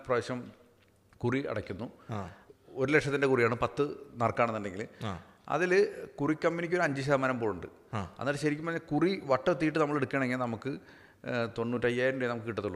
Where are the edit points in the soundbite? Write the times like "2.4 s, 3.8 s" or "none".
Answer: 2.4 s